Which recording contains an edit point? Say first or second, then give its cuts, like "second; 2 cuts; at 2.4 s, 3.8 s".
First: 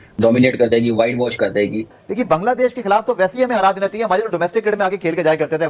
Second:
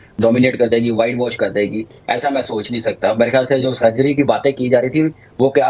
first; 1 cut; at 1.9 s